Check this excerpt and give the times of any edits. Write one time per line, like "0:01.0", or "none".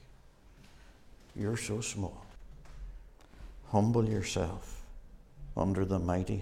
0:02.4